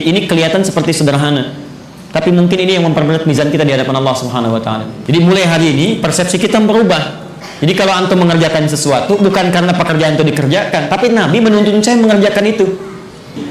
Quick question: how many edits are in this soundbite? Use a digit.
1